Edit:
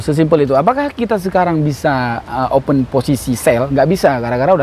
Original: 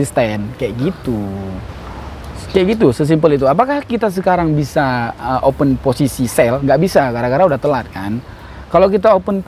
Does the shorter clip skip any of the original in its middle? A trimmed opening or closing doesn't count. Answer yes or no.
no